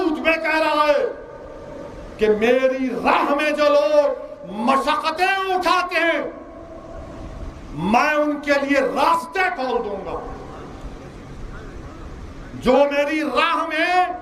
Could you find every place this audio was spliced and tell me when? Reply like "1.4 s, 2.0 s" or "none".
none